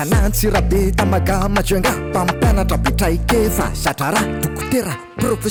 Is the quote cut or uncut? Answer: uncut